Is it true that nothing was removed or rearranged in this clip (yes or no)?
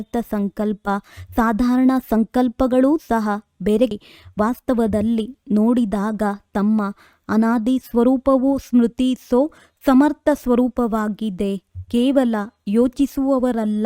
yes